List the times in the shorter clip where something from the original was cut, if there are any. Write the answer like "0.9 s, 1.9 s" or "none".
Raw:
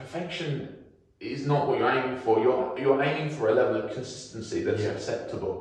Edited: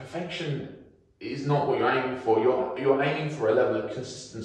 none